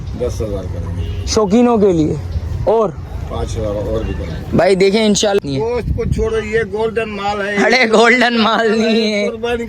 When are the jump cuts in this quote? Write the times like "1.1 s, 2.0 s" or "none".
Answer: 5.4 s